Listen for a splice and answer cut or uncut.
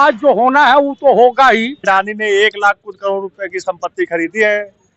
cut